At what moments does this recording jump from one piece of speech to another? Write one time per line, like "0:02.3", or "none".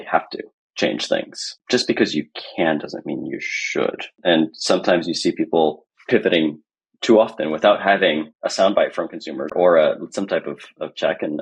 0:09.5